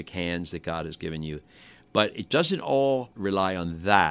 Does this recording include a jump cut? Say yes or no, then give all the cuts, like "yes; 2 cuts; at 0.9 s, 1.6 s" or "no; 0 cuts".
yes; 2 cuts; at 1.8 s, 3.1 s